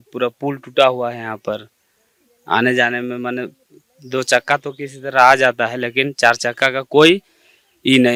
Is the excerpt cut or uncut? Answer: uncut